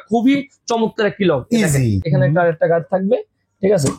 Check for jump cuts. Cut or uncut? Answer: cut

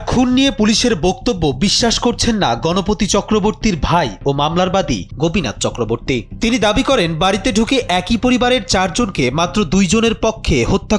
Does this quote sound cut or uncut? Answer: uncut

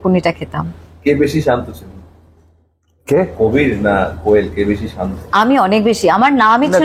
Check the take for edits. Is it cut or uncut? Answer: uncut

